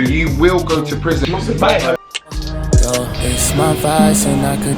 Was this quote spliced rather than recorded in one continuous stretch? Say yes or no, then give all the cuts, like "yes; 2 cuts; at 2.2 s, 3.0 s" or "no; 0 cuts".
yes; 2 cuts; at 1.2 s, 2.5 s